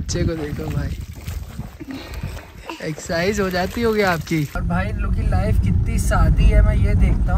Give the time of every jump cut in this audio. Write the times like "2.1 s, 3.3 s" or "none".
4.6 s